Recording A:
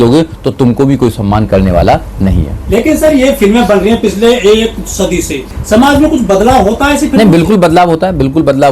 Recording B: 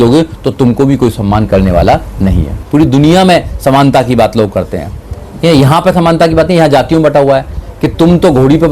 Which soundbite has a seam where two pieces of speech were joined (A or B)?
B